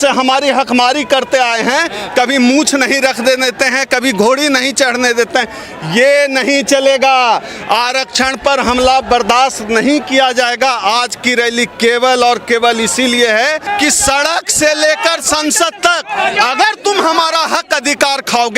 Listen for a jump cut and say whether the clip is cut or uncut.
cut